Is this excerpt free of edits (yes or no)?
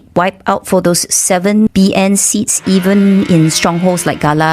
no